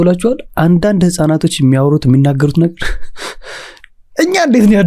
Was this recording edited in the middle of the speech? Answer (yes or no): no